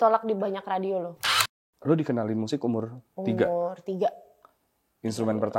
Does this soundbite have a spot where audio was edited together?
yes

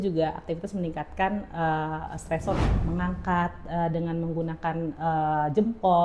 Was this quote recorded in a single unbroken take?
no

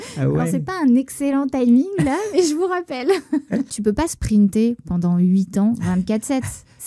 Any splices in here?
yes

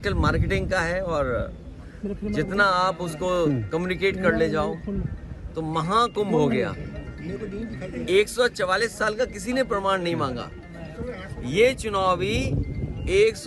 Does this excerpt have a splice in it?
no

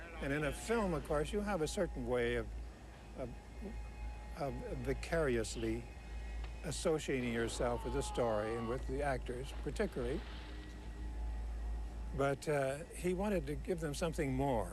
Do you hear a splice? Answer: yes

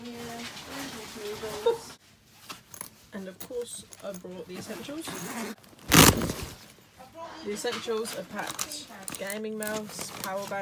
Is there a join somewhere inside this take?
yes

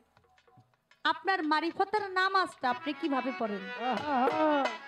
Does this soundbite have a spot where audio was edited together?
no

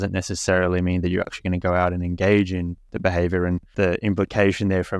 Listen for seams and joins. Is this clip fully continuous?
no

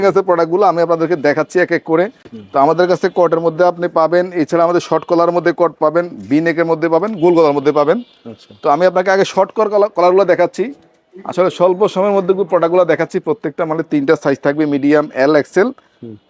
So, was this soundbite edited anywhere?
no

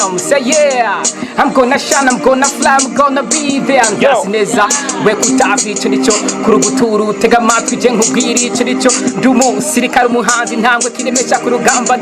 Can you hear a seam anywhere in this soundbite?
no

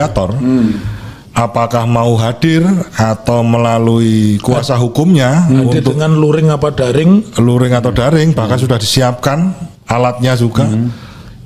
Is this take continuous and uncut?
yes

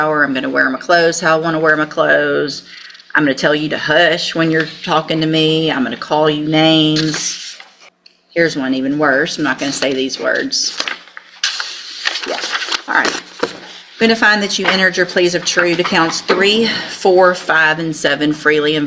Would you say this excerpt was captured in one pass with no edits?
yes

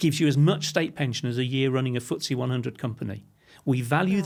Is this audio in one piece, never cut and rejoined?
yes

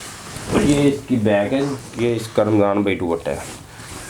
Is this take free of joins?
no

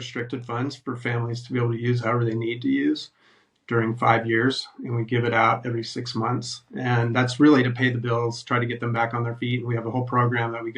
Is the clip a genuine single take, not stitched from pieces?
yes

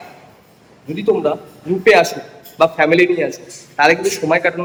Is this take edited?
no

